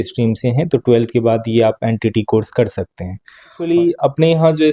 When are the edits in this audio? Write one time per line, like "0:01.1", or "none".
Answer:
0:03.6